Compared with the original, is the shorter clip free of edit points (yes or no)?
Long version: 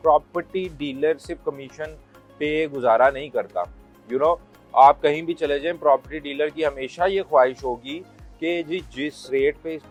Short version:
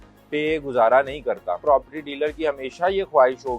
no